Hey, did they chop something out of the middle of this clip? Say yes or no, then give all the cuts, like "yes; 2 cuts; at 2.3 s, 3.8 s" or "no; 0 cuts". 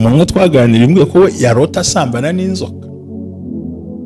yes; 1 cut; at 3.1 s